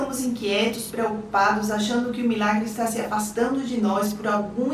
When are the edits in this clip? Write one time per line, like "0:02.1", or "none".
none